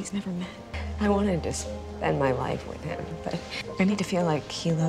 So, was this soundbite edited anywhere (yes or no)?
no